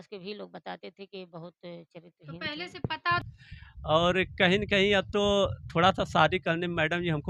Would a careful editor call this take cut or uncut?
cut